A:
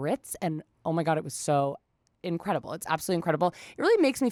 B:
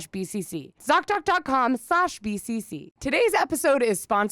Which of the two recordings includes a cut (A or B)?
B